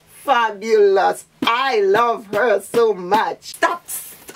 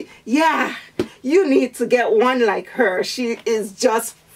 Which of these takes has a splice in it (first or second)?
first